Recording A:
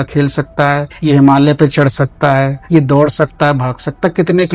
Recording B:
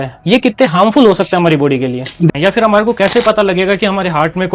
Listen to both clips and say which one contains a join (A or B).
B